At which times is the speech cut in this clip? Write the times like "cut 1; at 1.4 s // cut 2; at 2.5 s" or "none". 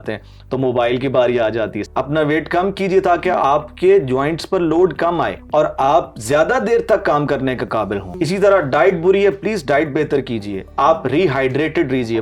cut 1; at 1.8 s // cut 2; at 5.4 s // cut 3; at 8.1 s // cut 4; at 10.6 s